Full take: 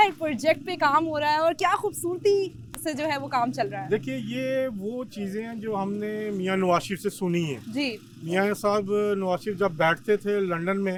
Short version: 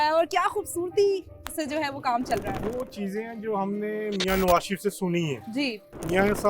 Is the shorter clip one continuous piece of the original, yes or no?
no